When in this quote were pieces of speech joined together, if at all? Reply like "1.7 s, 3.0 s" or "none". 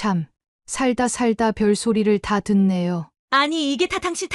3.1 s